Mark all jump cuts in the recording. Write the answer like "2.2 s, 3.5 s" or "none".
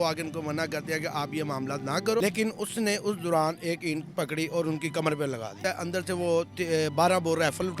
2.2 s, 5.6 s